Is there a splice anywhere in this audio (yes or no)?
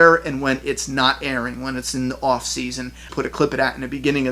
yes